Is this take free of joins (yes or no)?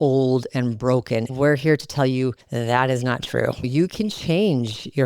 no